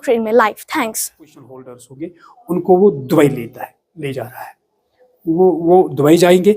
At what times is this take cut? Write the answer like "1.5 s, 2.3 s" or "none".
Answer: 1.4 s